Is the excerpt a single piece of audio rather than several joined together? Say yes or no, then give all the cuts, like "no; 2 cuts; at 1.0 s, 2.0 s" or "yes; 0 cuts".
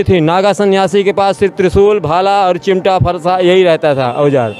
yes; 0 cuts